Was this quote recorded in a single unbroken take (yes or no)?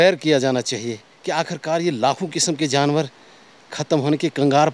yes